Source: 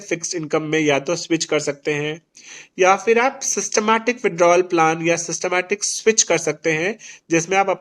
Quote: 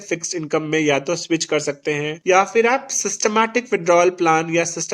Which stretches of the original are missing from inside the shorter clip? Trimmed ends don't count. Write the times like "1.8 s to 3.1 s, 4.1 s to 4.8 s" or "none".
2.1 s to 2.6 s